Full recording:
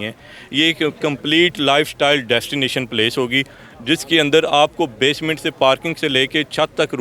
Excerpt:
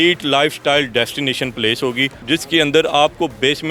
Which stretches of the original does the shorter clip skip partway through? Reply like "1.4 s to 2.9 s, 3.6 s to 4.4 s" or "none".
3.5 s to 3.8 s